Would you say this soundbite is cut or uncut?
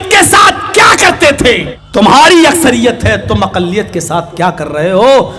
cut